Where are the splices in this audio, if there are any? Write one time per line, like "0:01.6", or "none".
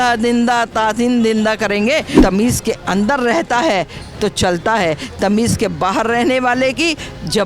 0:02.2